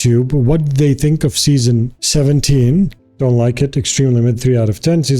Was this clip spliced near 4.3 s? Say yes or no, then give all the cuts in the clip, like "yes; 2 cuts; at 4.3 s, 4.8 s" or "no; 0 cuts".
no; 1 cut; at 3.0 s